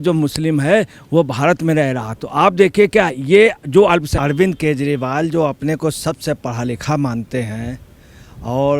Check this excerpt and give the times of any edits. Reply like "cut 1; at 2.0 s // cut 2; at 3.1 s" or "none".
cut 1; at 4.1 s